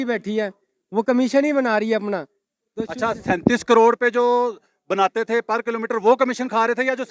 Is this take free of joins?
yes; 0 cuts

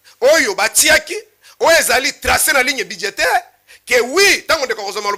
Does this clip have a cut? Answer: no; 0 cuts

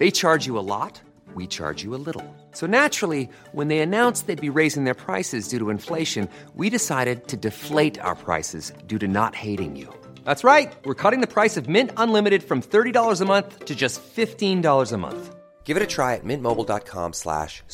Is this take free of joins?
yes; 0 cuts

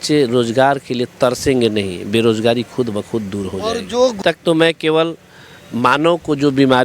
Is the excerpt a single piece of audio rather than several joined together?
no; 1 cut; at 4.2 s

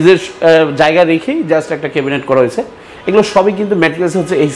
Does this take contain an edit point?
no; 0 cuts

